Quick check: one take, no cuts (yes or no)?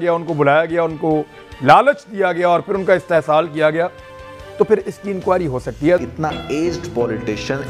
no